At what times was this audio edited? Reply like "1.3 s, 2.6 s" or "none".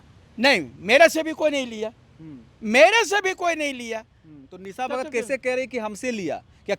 none